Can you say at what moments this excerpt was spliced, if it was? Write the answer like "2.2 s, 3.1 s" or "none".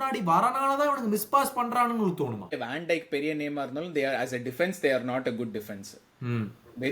2.6 s